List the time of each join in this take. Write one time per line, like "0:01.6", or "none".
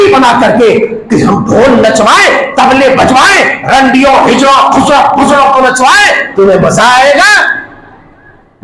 none